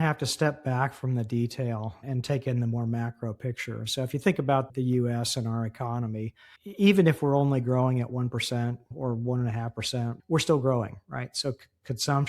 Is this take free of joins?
no; 2 cuts; at 8.9 s, 10.2 s

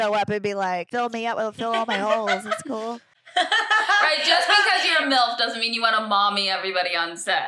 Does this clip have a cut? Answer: yes; 2 cuts; at 0.9 s, 3.3 s

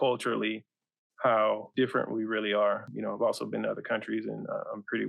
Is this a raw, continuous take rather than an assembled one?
no; 2 cuts; at 1.7 s, 2.9 s

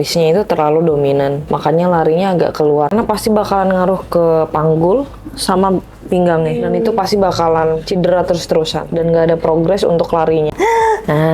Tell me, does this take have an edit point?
yes; 2 cuts; at 2.9 s, 10.5 s

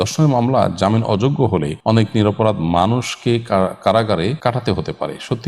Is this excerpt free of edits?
no; 2 cuts; at 1.7 s, 4.4 s

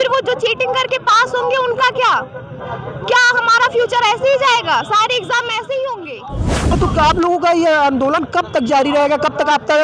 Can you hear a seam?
yes; 1 cut; at 6.5 s

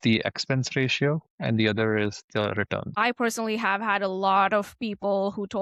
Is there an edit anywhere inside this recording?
yes; 1 cut; at 2.9 s

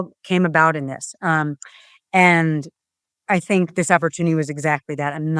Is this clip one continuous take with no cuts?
yes; 0 cuts

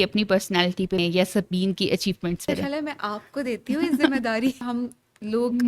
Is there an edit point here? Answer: yes; 3 cuts; at 1.0 s, 2.5 s, 4.6 s

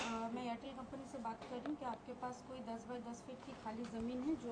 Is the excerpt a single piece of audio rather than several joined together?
yes; 0 cuts

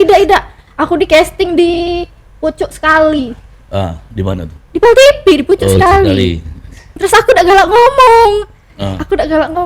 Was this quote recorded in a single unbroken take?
no; 1 cut; at 7.0 s

